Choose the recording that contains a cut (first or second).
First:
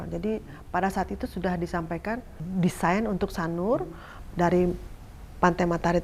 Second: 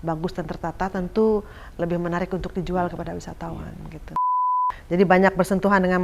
second